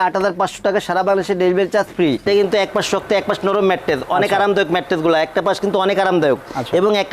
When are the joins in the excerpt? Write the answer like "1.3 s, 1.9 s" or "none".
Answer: 2.3 s